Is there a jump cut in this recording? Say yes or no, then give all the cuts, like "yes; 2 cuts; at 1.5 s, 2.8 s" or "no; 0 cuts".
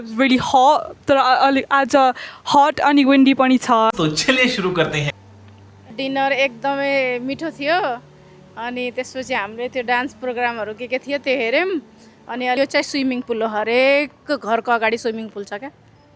yes; 2 cuts; at 3.9 s, 12.6 s